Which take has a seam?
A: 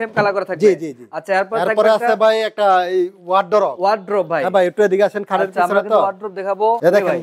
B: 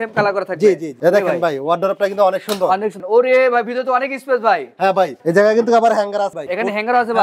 B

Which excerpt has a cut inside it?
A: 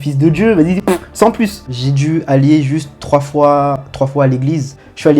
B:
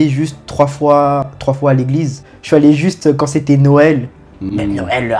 A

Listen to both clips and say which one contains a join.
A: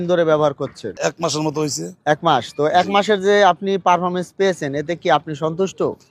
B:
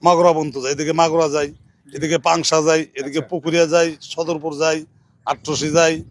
A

